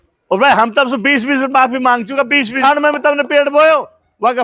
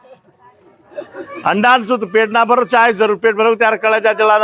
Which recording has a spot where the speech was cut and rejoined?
first; 1 cut; at 2.6 s

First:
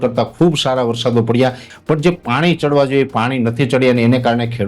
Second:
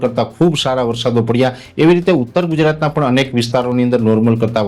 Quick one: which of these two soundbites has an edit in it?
first; 1 cut; at 1.7 s

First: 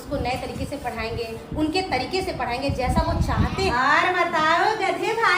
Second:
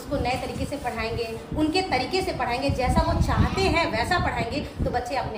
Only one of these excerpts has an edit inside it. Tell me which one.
first; 1 cut; at 3.6 s

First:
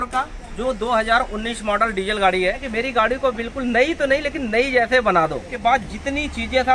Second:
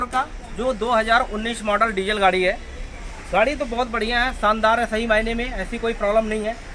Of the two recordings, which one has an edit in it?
first; 2 cuts; at 2.6 s, 5.5 s

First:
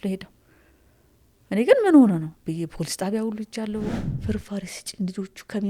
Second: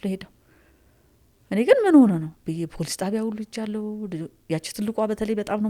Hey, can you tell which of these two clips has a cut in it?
first; 1 cut; at 3.9 s

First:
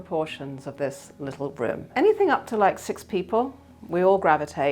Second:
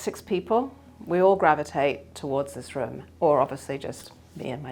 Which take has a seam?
first; 1 cut; at 1.9 s

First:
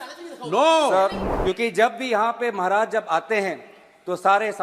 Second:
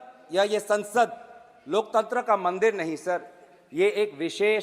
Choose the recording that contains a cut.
first; 1 cut; at 1.2 s

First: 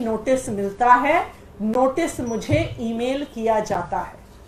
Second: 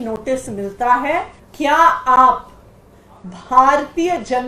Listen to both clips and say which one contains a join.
second; 1 cut; at 1.4 s

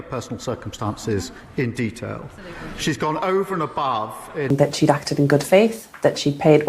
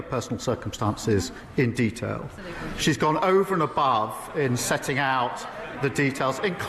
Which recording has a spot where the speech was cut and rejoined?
first; 1 cut; at 4.5 s

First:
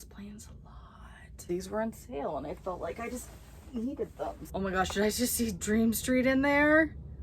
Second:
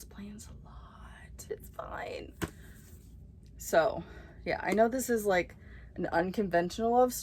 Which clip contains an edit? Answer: first; 2 cuts; at 1.3 s, 4.4 s

